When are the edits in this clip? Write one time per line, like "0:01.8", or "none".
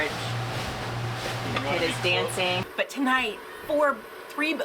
0:02.6